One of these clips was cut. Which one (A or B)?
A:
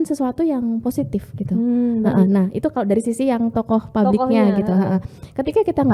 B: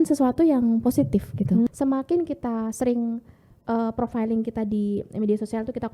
B